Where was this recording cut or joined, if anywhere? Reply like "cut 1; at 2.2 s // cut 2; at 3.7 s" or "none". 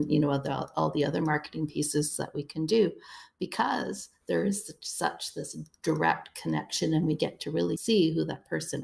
cut 1; at 7.8 s